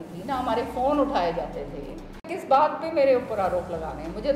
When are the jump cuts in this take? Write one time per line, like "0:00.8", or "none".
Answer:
0:02.3